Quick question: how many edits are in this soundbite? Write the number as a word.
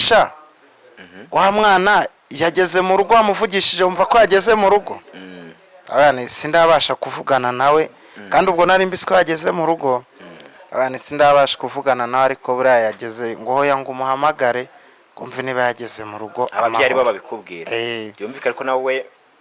zero